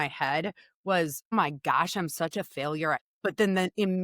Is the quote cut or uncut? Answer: cut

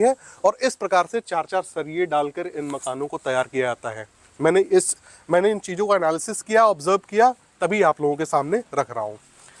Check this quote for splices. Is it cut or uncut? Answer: uncut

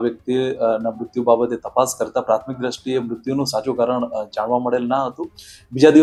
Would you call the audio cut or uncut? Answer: uncut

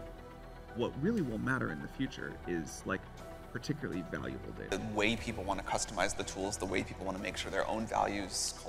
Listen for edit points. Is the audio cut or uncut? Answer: uncut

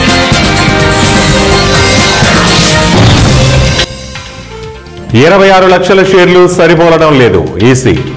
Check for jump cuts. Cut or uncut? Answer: uncut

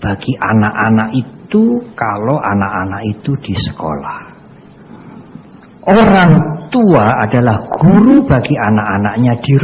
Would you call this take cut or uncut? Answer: cut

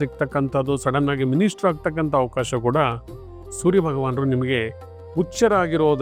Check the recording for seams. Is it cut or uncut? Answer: uncut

